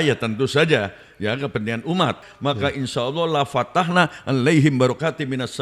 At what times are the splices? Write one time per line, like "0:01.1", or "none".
0:02.3